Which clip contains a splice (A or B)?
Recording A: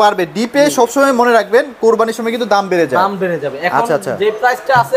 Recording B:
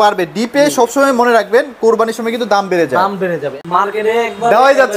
B